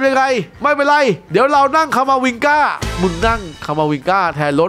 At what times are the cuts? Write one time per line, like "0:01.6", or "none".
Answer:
none